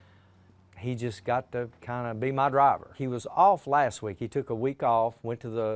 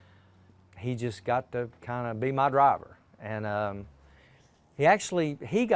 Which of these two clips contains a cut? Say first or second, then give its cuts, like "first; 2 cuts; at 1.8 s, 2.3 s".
first; 1 cut; at 3.0 s